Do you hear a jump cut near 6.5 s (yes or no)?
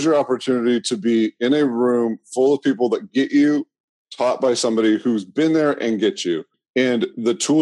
yes